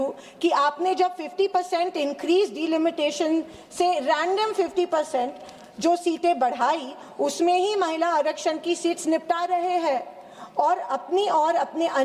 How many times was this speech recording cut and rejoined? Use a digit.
0